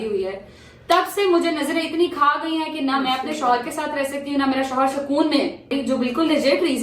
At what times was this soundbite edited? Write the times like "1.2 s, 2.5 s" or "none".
5.7 s